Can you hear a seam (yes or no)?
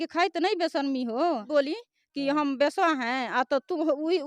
yes